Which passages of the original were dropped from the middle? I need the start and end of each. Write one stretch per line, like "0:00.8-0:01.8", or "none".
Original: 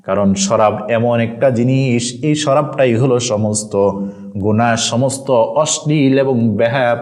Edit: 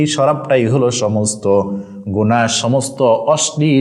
none